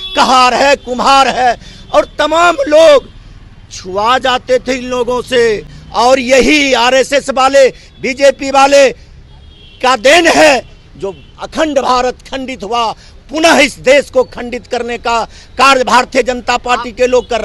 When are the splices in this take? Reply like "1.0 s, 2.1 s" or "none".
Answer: none